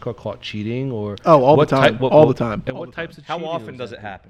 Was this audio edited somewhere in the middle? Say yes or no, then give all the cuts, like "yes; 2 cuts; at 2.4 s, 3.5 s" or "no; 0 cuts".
no; 0 cuts